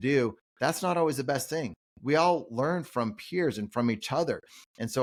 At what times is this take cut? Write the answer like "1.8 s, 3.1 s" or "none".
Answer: none